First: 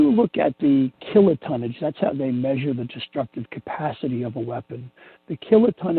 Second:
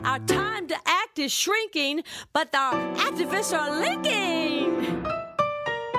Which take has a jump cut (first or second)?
first